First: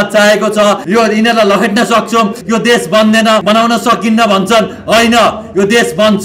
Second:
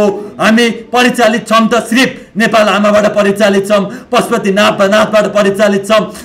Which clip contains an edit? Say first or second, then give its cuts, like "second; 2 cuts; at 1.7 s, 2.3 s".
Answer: first; 3 cuts; at 0.8 s, 2.4 s, 3.4 s